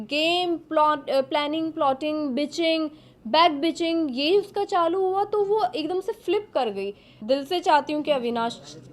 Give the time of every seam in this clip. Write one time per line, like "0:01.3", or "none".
0:07.1